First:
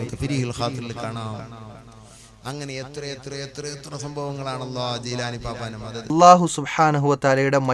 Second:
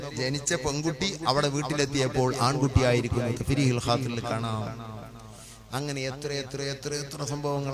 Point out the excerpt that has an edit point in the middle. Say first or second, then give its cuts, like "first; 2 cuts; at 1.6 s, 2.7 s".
first; 1 cut; at 6.1 s